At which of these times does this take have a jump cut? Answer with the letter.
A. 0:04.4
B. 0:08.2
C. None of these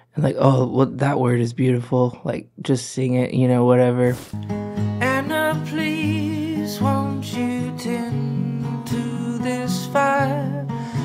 A